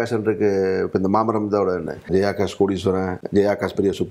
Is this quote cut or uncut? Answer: cut